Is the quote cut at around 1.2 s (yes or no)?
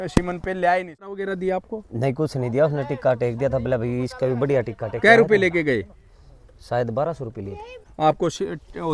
yes